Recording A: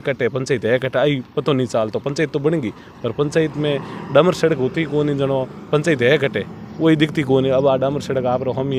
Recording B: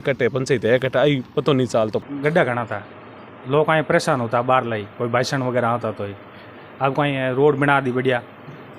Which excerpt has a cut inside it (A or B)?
B